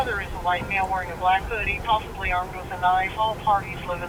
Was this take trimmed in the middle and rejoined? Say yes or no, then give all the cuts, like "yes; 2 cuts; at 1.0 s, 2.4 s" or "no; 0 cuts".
no; 0 cuts